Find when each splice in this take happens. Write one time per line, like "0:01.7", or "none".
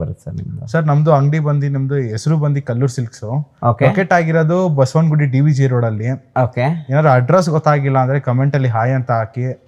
none